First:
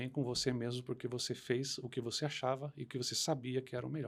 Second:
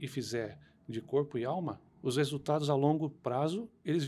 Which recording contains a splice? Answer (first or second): second